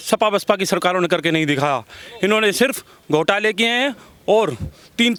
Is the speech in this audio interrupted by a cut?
no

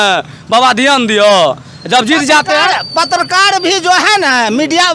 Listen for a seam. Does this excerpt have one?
no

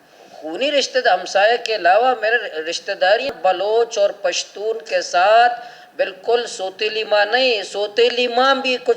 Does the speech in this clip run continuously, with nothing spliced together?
no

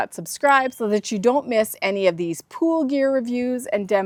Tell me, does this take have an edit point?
no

